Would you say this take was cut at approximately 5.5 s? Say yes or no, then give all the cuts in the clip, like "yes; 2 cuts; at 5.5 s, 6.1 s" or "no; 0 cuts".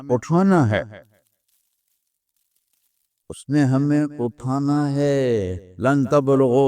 yes; 1 cut; at 5.5 s